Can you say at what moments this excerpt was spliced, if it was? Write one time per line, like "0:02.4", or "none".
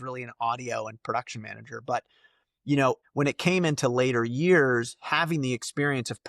0:03.0